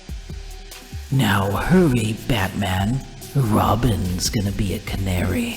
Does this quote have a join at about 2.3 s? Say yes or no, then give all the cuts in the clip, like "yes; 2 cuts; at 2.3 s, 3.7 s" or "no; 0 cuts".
no; 1 cut; at 1.0 s